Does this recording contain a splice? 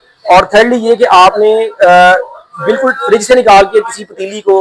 no; 0 cuts

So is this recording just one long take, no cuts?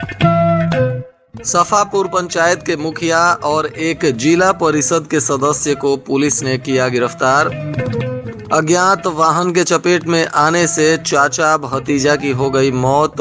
no; 1 cut; at 1.0 s

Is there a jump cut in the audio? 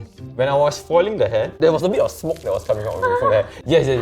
yes; 1 cut; at 1.5 s

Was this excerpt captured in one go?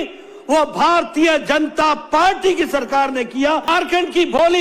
no; 1 cut; at 3.7 s

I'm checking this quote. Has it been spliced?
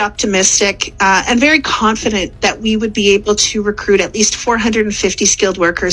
no; 0 cuts

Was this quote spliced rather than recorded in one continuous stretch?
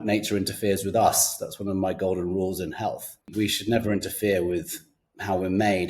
yes; 1 cut; at 3.3 s

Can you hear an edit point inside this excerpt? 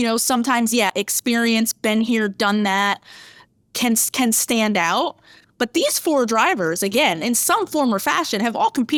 no; 0 cuts

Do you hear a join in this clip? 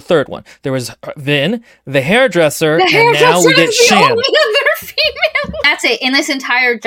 yes; 1 cut; at 5.6 s

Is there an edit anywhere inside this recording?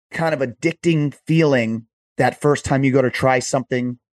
no; 0 cuts

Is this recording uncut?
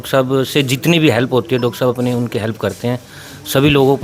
yes; 0 cuts

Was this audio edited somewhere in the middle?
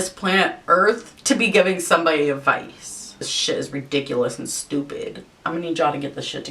yes; 2 cuts; at 3.1 s, 5.4 s

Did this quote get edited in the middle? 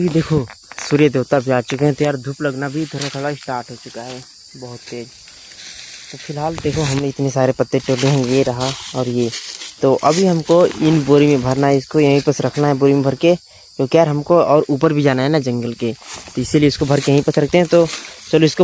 no; 0 cuts

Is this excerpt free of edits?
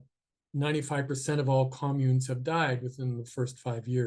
yes; 0 cuts

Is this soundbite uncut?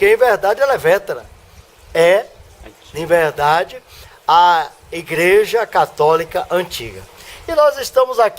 no; 1 cut; at 4.1 s

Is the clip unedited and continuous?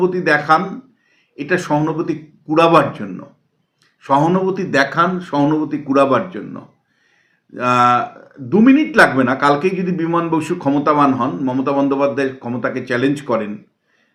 yes; 0 cuts

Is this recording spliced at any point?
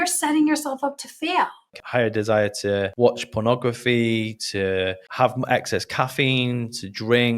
yes; 1 cut; at 1.8 s

